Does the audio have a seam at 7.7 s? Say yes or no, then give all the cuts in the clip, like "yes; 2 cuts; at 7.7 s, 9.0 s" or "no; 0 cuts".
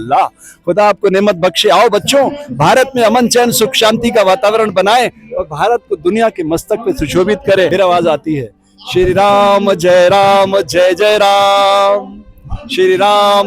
yes; 1 cut; at 7.7 s